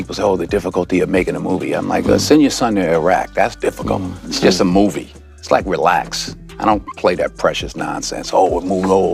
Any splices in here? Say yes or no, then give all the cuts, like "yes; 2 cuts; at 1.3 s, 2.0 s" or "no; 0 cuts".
no; 0 cuts